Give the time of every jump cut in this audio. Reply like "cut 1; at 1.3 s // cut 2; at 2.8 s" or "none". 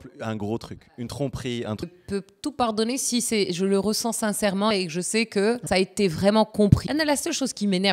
cut 1; at 1.8 s // cut 2; at 4.7 s // cut 3; at 5.6 s // cut 4; at 6.8 s